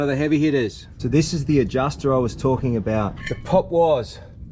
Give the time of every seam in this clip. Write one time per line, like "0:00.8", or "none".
0:00.9
0:03.2